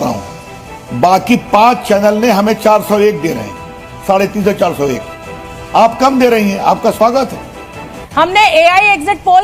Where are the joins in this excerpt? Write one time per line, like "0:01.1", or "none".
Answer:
0:08.0